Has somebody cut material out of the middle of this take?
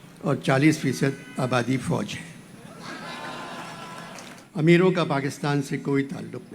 yes; 1 cut; at 4.4 s

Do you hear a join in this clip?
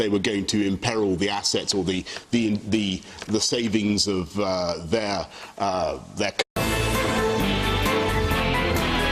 no; 0 cuts

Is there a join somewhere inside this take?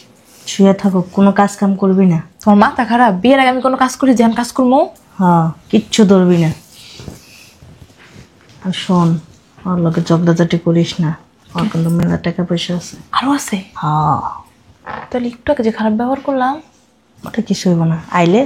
no; 0 cuts

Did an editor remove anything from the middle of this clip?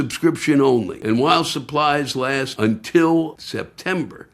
yes; 3 cuts; at 0.9 s, 2.5 s, 3.4 s

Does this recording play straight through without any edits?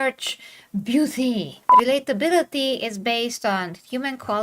no; 1 cut; at 1.6 s

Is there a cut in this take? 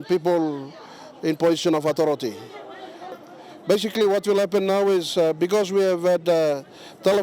yes; 1 cut; at 3.2 s

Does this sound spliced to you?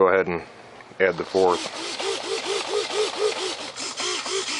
no; 0 cuts

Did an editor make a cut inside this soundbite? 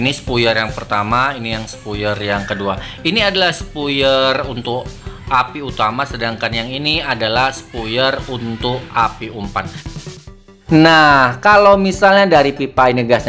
yes; 1 cut; at 10.2 s

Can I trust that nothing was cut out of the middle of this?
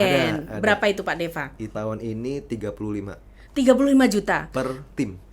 no; 1 cut; at 1.7 s

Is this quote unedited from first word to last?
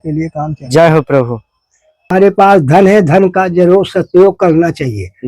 no; 1 cut; at 2.1 s

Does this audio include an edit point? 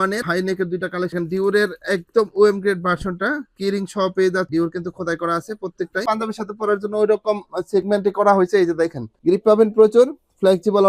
yes; 3 cuts; at 1.1 s, 4.5 s, 6.0 s

